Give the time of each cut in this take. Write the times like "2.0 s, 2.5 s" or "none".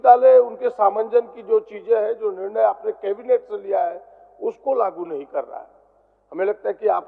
none